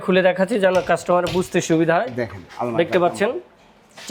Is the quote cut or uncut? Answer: uncut